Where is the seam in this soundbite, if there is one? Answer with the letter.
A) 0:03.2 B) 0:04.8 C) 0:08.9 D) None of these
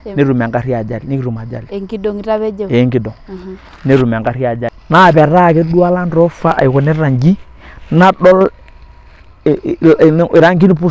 B